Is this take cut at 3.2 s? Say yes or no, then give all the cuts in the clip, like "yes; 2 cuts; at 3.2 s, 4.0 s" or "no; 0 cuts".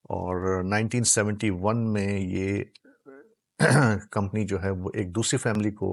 no; 0 cuts